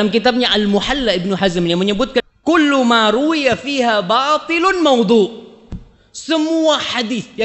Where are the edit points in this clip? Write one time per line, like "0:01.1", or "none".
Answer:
0:02.2